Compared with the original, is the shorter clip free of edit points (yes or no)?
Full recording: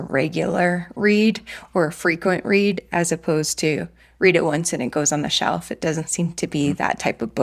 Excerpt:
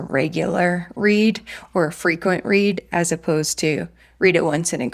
yes